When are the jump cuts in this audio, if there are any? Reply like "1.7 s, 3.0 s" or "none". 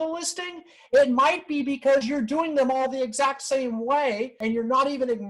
4.3 s